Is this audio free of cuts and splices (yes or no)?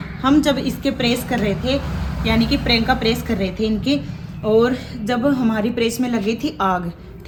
yes